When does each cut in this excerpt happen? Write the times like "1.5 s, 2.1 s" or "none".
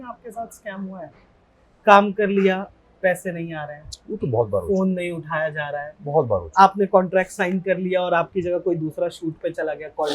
none